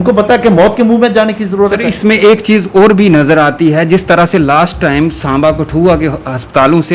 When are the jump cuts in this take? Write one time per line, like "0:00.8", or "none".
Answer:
none